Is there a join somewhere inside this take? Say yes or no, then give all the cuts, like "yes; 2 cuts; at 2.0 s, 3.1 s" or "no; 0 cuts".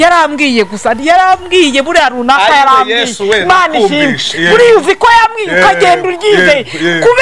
no; 0 cuts